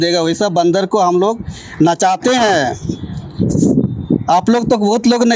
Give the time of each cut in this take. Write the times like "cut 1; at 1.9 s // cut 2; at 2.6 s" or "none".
none